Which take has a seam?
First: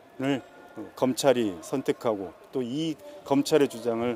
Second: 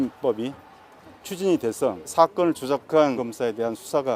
second; 2 cuts; at 2.1 s, 3.2 s

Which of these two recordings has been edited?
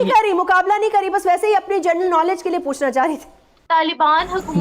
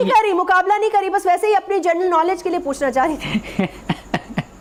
first; 1 cut; at 3.3 s

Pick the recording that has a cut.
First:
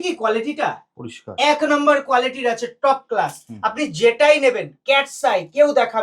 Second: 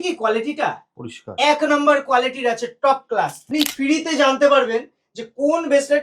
second; 1 cut; at 3.4 s

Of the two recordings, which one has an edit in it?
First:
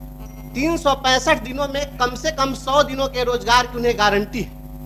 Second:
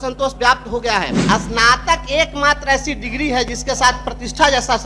second; 1 cut; at 1.2 s

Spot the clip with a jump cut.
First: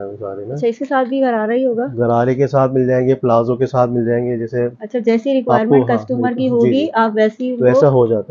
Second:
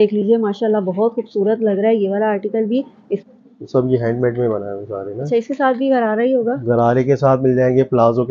second; 1 cut; at 3.2 s

